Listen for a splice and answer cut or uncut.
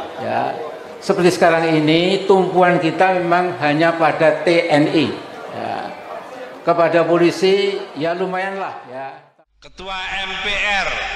cut